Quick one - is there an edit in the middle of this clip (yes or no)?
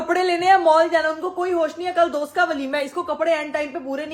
no